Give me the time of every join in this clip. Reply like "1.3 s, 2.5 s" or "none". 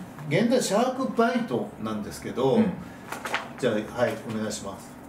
none